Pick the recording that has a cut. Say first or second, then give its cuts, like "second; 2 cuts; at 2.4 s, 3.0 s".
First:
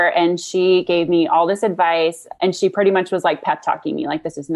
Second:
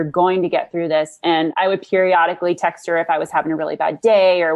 second; 1 cut; at 1.5 s